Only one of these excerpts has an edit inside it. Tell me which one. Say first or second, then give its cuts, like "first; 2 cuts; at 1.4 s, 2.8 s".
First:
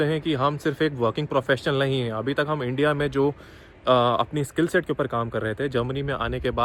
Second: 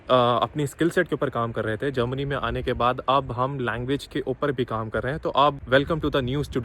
second; 1 cut; at 5.6 s